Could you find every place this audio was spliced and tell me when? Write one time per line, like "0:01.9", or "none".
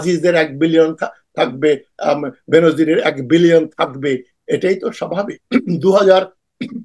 0:05.3